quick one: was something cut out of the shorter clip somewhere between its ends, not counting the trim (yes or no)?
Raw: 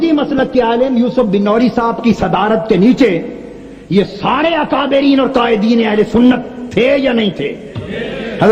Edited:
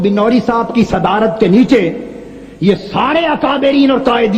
no